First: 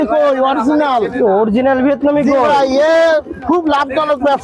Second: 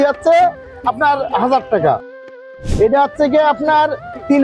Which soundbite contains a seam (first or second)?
second